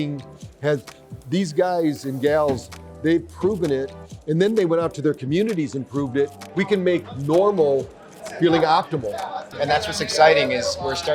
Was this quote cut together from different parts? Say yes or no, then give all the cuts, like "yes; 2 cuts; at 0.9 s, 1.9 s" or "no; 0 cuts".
yes; 2 cuts; at 6.5 s, 9.5 s